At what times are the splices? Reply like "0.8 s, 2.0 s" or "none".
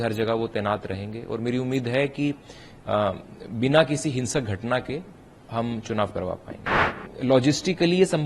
7.0 s